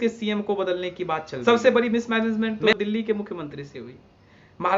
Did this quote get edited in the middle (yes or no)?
yes